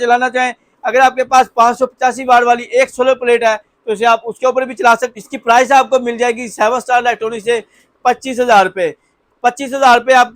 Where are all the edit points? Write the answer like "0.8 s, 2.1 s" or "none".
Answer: 5.1 s